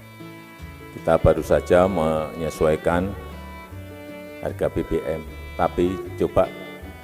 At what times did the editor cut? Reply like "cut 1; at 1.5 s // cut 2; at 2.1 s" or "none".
cut 1; at 1.0 s